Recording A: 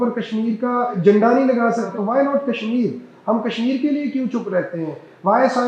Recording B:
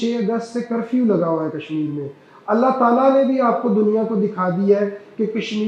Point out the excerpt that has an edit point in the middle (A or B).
A